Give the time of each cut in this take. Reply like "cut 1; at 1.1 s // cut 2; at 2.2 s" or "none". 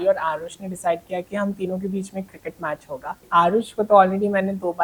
cut 1; at 3.2 s